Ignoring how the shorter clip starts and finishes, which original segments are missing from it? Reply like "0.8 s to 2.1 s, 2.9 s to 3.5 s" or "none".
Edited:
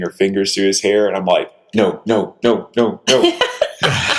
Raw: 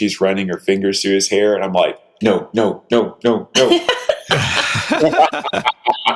none

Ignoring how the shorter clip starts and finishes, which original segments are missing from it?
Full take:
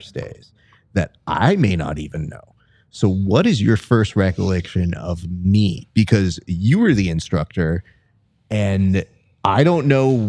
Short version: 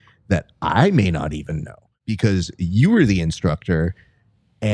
2.7 s to 5.9 s

